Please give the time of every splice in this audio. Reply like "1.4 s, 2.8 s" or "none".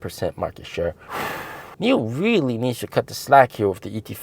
1.6 s